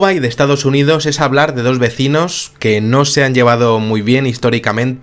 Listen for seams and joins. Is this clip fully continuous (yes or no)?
no